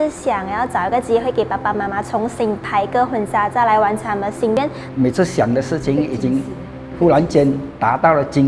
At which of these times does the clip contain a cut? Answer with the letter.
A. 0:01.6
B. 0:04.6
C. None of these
B